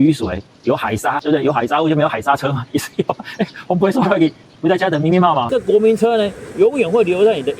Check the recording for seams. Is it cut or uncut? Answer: cut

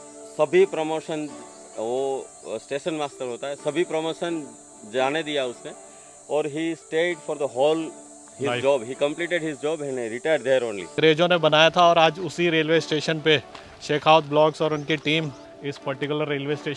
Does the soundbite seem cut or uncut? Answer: cut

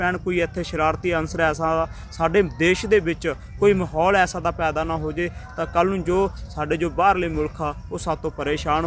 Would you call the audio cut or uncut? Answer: uncut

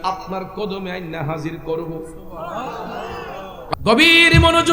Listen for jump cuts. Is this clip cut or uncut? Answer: cut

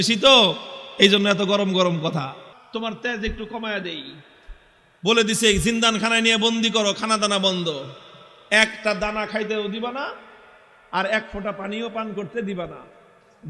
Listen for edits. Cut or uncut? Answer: cut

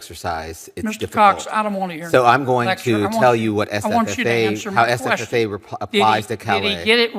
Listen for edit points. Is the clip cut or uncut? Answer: uncut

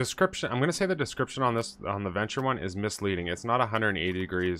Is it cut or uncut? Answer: uncut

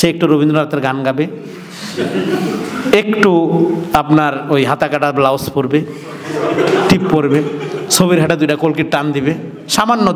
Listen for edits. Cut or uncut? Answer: uncut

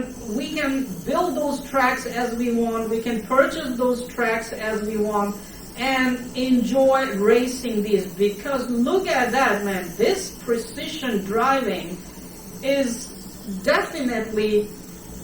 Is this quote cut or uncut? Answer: uncut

